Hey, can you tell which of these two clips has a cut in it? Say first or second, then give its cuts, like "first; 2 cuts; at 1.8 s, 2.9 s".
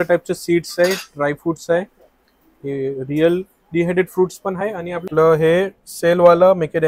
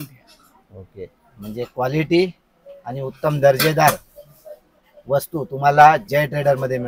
first; 1 cut; at 5.0 s